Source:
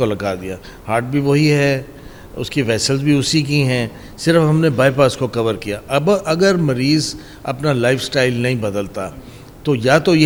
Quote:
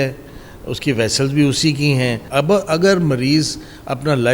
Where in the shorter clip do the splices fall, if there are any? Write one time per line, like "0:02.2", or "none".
0:02.2